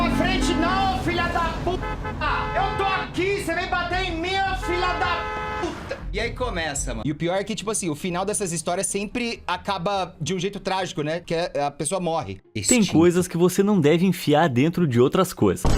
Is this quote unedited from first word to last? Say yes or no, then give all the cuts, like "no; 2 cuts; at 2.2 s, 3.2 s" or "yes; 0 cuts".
no; 2 cuts; at 7.0 s, 12.4 s